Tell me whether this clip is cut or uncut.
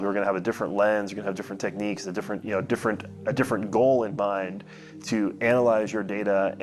uncut